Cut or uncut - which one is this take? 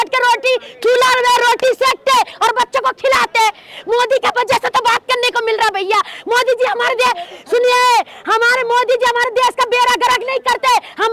uncut